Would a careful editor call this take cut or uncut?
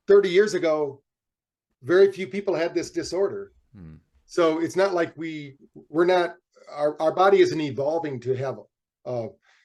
uncut